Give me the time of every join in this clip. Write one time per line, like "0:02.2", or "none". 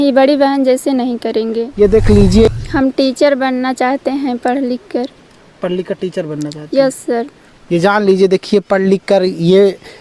0:02.4